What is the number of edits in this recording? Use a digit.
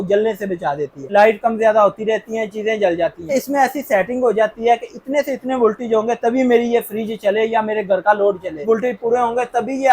3